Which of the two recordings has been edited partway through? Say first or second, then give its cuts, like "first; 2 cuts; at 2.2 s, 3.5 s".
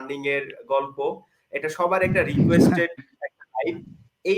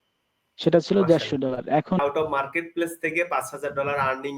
second; 1 cut; at 2.0 s